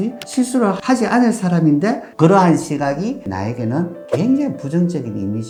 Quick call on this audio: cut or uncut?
uncut